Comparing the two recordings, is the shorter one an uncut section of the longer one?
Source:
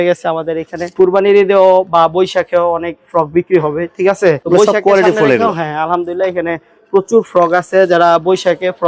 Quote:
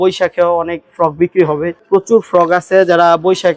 no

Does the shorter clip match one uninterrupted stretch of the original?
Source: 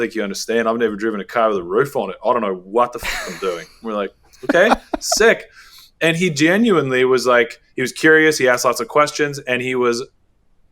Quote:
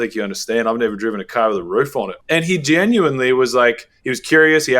no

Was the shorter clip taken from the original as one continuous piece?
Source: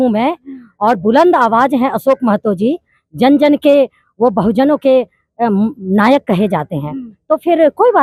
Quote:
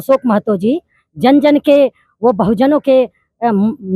yes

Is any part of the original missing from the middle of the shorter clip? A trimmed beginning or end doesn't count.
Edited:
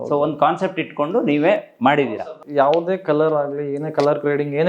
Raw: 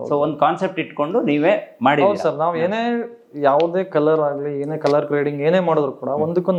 yes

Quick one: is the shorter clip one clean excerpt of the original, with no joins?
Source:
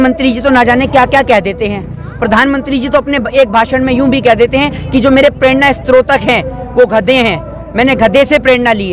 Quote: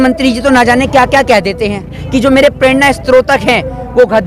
no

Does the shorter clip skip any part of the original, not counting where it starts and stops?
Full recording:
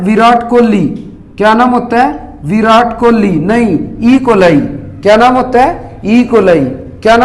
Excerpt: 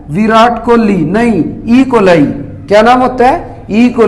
no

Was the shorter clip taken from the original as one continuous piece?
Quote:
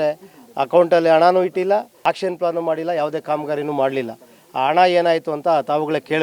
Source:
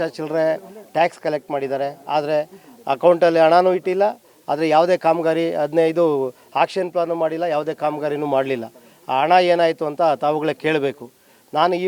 no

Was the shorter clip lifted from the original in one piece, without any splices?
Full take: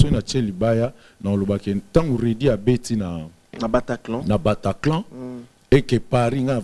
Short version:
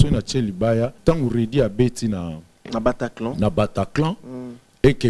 no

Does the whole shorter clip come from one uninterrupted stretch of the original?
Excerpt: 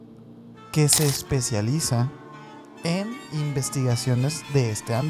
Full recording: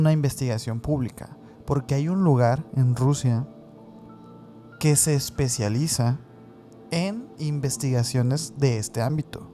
yes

